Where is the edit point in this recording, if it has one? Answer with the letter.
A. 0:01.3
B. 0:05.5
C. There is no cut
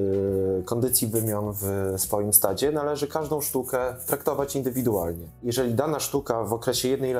B